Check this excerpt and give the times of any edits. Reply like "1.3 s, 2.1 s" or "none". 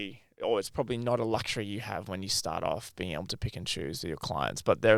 none